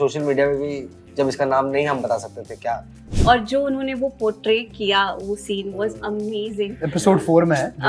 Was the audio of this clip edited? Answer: yes; 1 cut; at 3.1 s

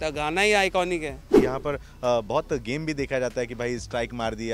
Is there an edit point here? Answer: yes; 1 cut; at 1.2 s

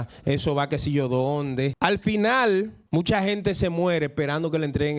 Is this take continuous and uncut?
no; 2 cuts; at 1.7 s, 2.8 s

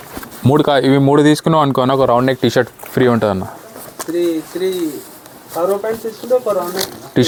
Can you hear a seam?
no; 0 cuts

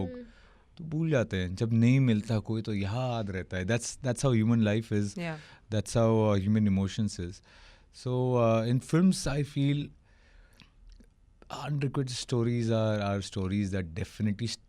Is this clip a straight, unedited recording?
yes; 0 cuts

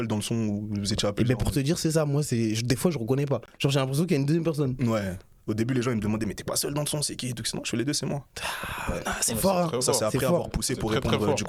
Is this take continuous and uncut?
yes; 0 cuts

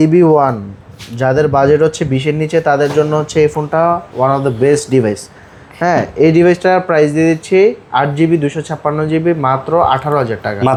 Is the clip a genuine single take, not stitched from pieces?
yes; 0 cuts

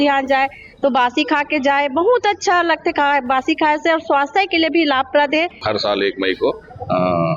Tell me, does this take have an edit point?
yes; 1 cut; at 5.6 s

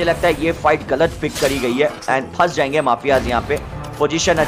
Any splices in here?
no; 0 cuts

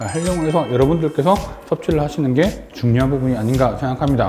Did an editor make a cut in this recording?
no; 0 cuts

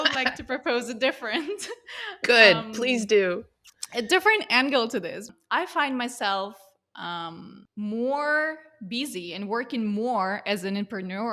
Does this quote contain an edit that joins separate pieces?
yes; 2 cuts; at 5.3 s, 7.6 s

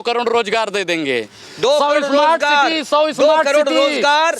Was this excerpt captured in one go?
yes; 0 cuts

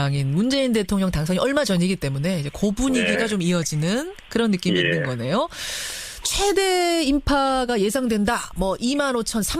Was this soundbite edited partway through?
yes; 1 cut; at 4.3 s

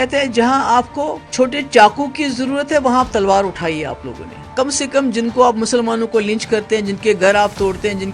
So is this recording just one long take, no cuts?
no; 2 cuts; at 1.2 s, 4.3 s

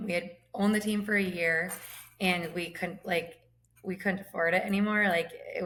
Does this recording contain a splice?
no; 0 cuts

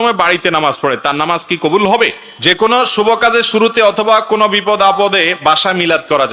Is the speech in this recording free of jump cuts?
no; 1 cut; at 2.3 s

